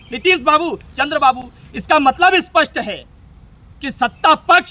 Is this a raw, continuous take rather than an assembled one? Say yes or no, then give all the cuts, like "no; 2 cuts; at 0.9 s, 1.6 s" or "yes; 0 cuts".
yes; 0 cuts